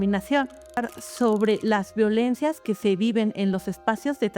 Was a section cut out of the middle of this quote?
yes; 1 cut; at 0.9 s

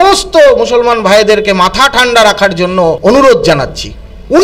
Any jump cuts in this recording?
yes; 1 cut; at 3.0 s

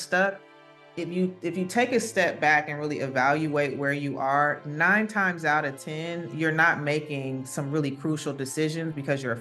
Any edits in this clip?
no; 0 cuts

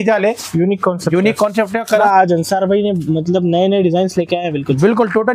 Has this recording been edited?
yes; 1 cut; at 1.9 s

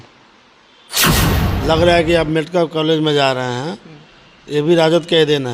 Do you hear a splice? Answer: yes; 1 cut; at 1.2 s

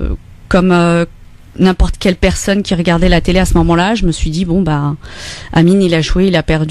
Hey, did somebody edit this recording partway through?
yes; 1 cut; at 4.0 s

